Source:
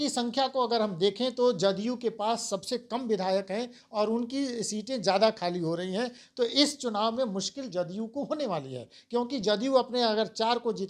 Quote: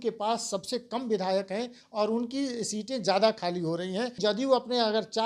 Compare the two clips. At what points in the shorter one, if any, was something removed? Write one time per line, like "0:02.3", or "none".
0:04.1